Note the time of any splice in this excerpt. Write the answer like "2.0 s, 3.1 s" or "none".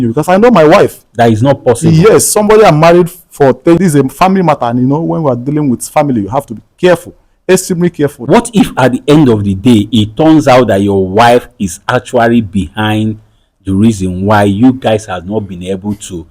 3.8 s, 8.2 s

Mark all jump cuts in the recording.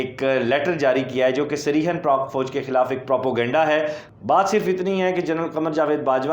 4.0 s

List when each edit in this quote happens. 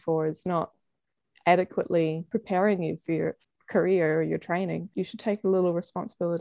2.2 s, 3.4 s, 4.9 s

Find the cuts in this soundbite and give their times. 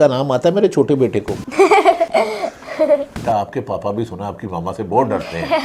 1.4 s, 2.1 s, 3.1 s

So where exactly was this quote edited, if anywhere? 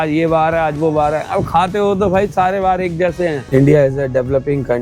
3.4 s

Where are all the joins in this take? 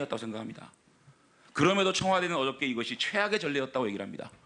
3.4 s

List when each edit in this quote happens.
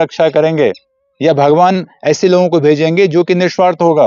none

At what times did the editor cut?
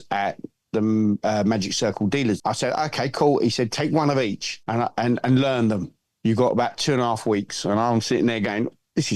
2.4 s, 4.5 s

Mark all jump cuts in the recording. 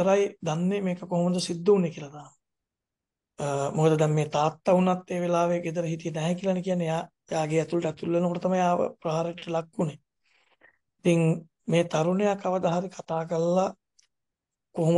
none

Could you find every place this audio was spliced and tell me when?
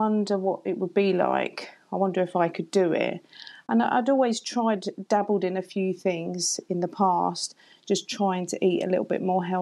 none

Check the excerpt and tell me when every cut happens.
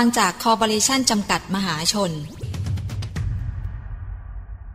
2.5 s

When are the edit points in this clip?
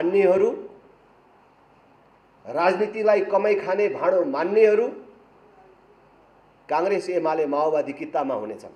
none

